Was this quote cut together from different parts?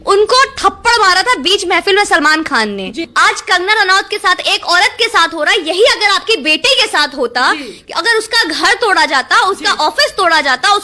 yes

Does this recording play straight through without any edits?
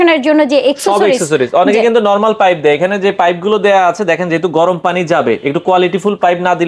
yes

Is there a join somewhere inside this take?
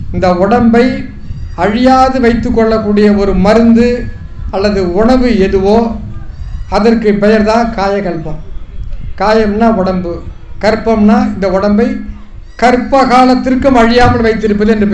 no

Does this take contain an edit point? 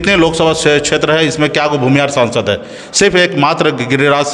no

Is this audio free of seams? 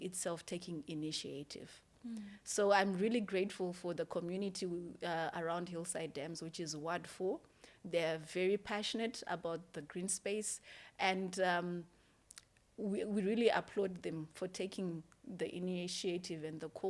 yes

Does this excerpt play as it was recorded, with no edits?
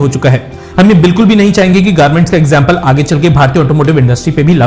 yes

